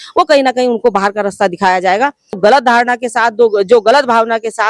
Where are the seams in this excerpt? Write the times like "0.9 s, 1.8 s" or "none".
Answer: 2.4 s